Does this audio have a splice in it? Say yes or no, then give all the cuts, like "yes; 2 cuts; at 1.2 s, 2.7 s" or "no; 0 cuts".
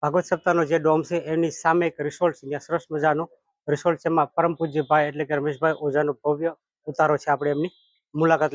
no; 0 cuts